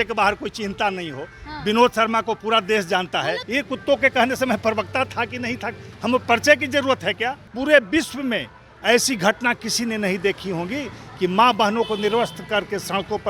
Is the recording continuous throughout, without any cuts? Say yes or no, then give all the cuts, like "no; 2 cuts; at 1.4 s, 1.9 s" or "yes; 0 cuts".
no; 2 cuts; at 3.4 s, 7.5 s